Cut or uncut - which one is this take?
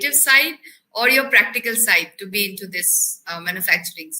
uncut